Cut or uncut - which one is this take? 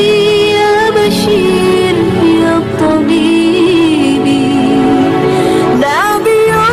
uncut